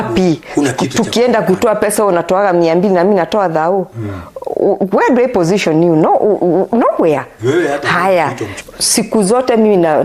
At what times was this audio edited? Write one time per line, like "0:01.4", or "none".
0:08.5